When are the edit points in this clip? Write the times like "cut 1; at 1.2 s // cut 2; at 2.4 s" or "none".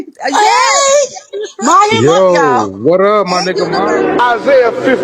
cut 1; at 3.8 s